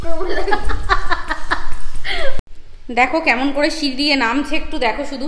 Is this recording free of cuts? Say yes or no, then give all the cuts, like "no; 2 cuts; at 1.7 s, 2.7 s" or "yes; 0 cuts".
no; 1 cut; at 2.4 s